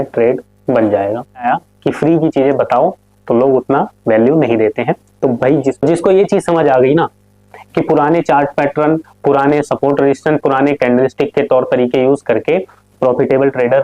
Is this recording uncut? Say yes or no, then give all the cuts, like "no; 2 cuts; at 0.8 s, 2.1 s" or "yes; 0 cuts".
no; 2 cuts; at 1.5 s, 5.8 s